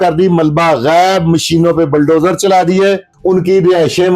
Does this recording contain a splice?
yes; 1 cut; at 3.1 s

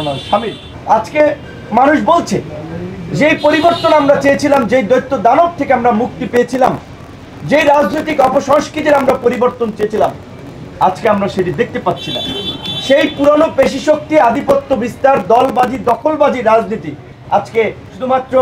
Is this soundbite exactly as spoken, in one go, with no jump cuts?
yes; 0 cuts

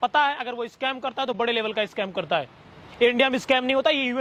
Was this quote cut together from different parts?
no; 0 cuts

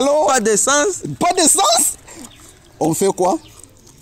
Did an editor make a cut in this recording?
no; 0 cuts

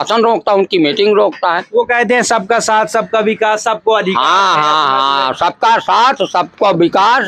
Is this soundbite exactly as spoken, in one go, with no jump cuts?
yes; 0 cuts

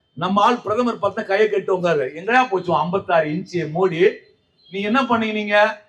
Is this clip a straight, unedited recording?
yes; 0 cuts

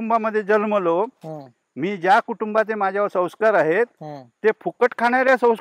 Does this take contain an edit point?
no; 0 cuts

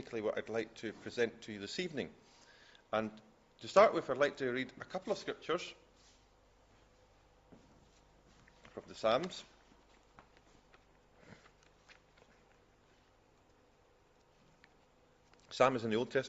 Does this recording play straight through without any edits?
no; 1 cut; at 12.8 s

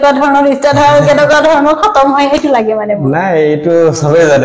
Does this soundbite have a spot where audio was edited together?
no; 0 cuts

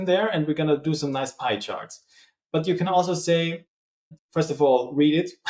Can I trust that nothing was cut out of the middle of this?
yes; 0 cuts

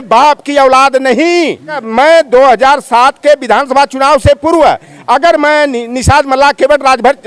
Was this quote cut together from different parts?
yes; 1 cut; at 1.8 s

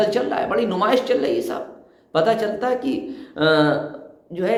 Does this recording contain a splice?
no; 0 cuts

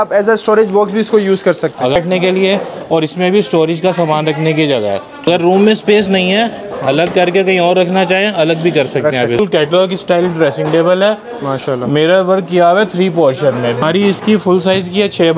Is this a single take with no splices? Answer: no; 4 cuts; at 2.0 s, 5.3 s, 9.4 s, 13.8 s

